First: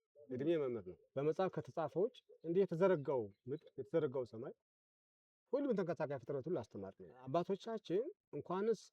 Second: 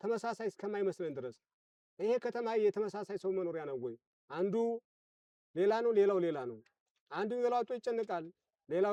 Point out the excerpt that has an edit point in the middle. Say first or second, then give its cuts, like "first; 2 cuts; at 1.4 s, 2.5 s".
first; 2 cuts; at 1.0 s, 7.3 s